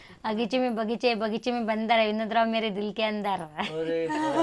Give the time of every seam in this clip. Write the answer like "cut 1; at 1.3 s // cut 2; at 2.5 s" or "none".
none